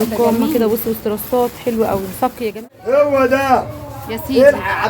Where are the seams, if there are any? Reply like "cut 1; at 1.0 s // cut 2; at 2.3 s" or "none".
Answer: cut 1; at 2.5 s